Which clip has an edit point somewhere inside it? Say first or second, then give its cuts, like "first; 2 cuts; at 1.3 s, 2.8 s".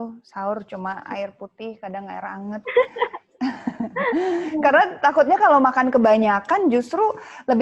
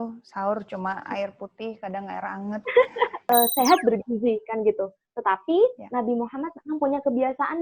second; 1 cut; at 3.2 s